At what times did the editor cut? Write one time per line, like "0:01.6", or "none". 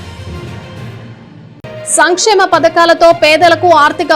0:01.1